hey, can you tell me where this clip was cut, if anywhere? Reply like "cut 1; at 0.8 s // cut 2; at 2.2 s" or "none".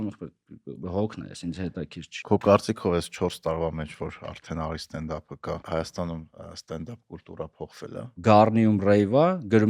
cut 1; at 2.2 s // cut 2; at 5.6 s // cut 3; at 8.2 s